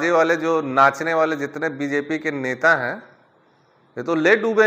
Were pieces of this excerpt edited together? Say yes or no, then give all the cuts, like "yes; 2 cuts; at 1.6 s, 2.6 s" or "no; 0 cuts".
no; 0 cuts